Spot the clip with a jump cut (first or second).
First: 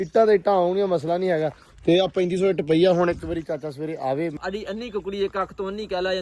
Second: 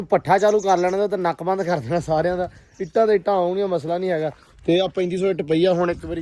first